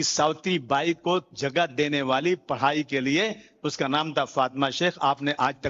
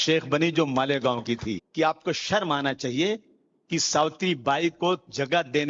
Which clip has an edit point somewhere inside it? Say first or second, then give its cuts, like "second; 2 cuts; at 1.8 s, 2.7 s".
second; 1 cut; at 1.6 s